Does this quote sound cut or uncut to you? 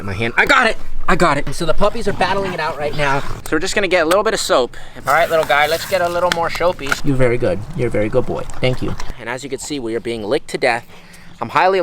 cut